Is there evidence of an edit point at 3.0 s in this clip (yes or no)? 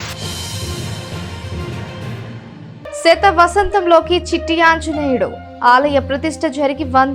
yes